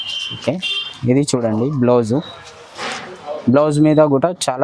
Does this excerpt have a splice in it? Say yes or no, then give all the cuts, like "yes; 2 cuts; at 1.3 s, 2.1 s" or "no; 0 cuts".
no; 0 cuts